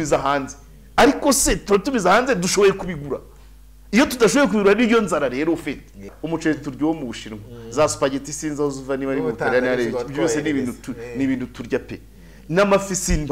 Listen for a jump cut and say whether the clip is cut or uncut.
cut